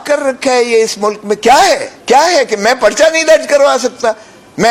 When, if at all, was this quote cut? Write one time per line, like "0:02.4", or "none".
0:01.9